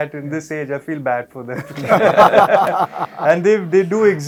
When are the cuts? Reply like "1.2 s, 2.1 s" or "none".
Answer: none